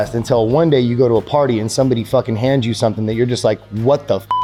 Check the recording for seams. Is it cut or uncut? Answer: uncut